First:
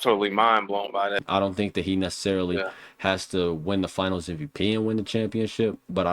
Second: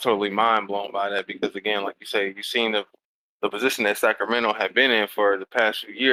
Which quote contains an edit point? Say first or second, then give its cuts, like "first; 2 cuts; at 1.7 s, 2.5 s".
first; 1 cut; at 1.2 s